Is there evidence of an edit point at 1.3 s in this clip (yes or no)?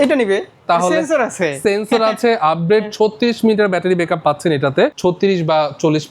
no